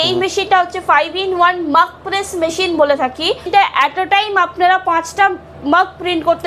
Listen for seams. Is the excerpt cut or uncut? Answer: cut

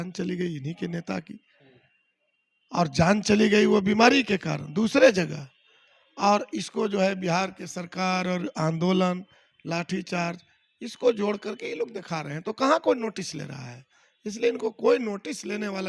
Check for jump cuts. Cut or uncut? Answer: uncut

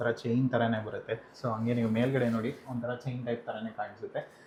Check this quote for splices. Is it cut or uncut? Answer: uncut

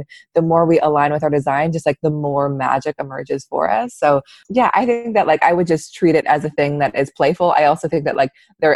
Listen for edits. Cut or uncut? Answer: cut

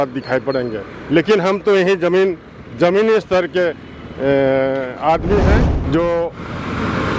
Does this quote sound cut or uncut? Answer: cut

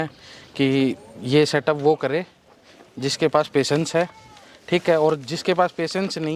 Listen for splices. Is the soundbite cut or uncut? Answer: uncut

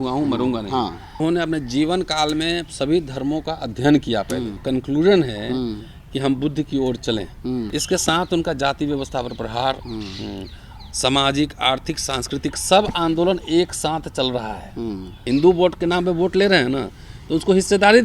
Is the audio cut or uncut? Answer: cut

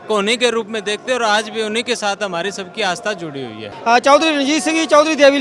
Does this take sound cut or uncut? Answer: cut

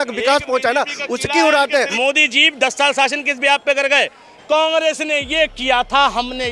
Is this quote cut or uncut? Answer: cut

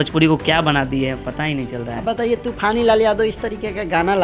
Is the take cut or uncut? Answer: uncut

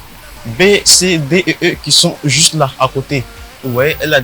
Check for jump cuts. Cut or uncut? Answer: uncut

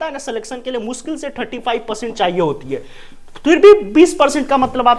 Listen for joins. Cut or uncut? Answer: uncut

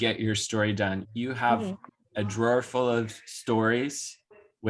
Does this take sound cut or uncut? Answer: cut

